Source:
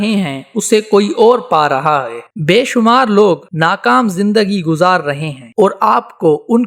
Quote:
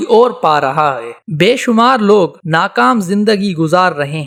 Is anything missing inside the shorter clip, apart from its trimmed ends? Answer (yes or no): no